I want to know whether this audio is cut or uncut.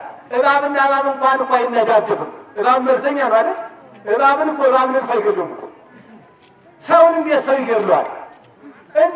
uncut